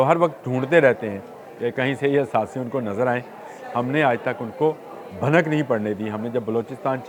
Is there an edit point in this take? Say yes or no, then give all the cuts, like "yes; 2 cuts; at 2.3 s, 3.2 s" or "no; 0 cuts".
no; 0 cuts